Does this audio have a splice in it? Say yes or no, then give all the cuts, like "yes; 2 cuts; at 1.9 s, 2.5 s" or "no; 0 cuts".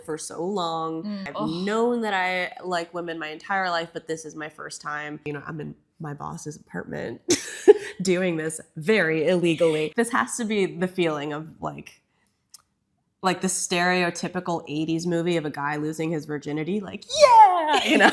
yes; 3 cuts; at 1.2 s, 5.3 s, 9.9 s